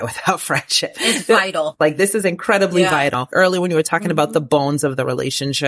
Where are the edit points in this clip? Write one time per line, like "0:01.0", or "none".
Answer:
0:01.7
0:03.2

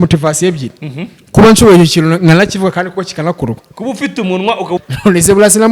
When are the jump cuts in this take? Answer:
0:04.8

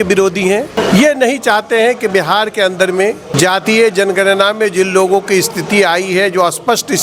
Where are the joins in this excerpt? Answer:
0:00.8
0:03.3

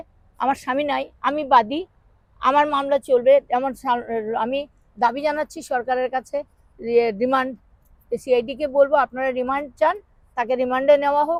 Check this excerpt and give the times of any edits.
none

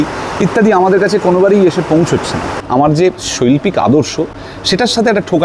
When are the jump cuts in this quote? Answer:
0:02.6

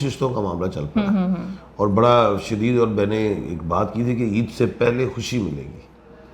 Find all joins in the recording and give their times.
none

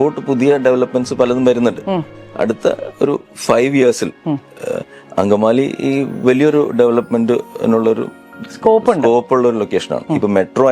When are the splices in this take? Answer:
0:02.2

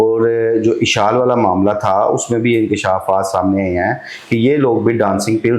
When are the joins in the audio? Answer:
none

